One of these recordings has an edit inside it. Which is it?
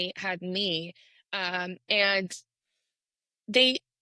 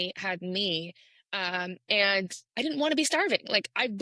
second; 1 cut; at 2.4 s

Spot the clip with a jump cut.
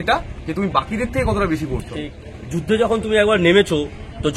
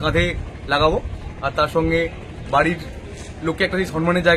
first; 1 cut; at 2.2 s

